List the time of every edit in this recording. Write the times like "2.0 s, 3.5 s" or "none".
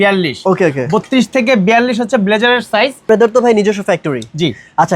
3.0 s